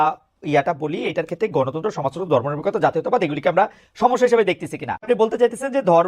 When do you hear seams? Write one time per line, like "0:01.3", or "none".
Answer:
0:05.0